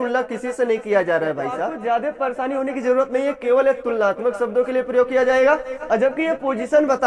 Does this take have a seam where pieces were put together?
yes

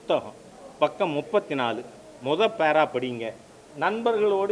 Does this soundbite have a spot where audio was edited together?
no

